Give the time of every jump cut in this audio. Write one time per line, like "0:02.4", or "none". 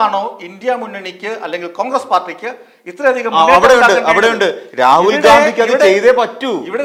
none